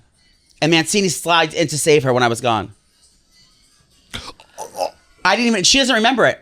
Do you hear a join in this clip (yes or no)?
no